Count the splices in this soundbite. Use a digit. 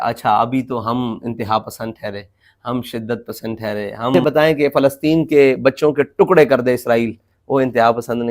1